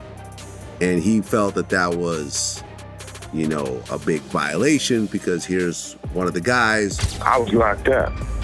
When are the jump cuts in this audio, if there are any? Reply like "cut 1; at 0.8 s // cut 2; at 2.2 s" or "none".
cut 1; at 7.1 s